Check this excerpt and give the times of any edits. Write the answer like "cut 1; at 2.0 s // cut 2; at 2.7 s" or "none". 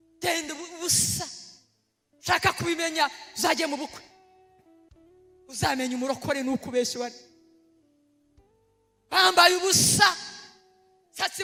none

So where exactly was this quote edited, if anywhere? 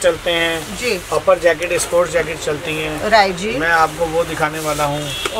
none

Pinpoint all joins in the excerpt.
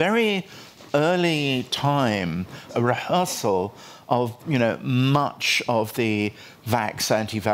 cut 1; at 2.6 s

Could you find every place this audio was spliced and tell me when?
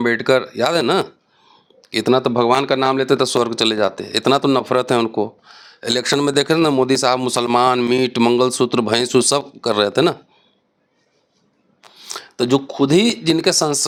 none

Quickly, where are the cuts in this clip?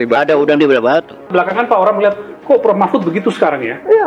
cut 1; at 1.2 s

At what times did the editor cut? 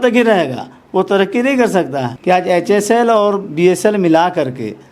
cut 1; at 2.1 s

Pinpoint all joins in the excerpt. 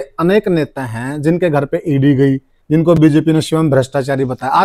none

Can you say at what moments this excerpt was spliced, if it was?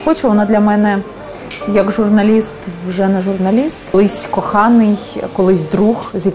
cut 1; at 3.9 s

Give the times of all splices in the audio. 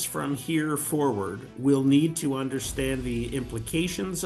none

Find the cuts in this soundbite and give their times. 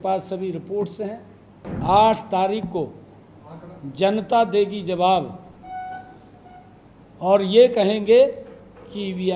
cut 1; at 1.7 s

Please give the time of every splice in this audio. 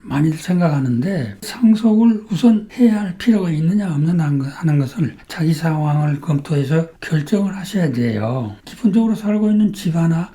cut 1; at 1.5 s // cut 2; at 7.0 s // cut 3; at 8.6 s

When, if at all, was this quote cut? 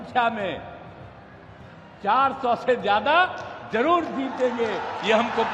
none

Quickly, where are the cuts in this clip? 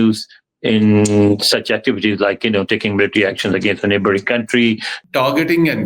cut 1; at 5.0 s

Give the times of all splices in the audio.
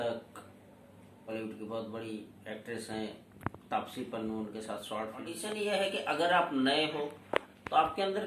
cut 1; at 1.3 s // cut 2; at 5.4 s

